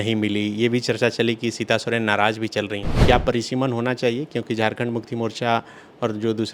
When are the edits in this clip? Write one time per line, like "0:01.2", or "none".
0:03.0